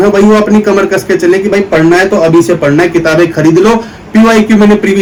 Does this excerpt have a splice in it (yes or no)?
no